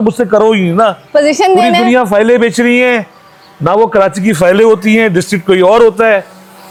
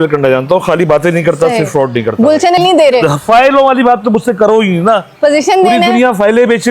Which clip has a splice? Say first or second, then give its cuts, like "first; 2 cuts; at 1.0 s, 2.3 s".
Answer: second; 1 cut; at 2.6 s